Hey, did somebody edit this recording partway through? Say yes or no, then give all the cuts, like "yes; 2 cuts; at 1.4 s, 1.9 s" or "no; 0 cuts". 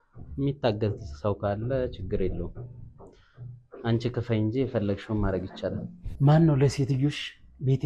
yes; 1 cut; at 6.0 s